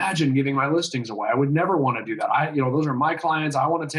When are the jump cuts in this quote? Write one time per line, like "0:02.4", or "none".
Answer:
none